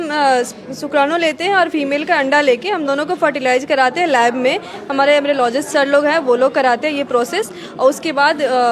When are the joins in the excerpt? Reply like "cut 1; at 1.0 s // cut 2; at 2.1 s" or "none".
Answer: none